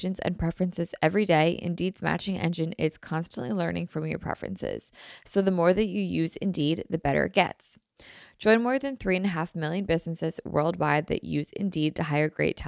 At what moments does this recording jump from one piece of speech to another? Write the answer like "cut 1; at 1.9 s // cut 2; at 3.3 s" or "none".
none